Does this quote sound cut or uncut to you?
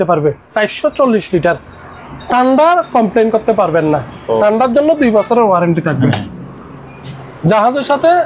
uncut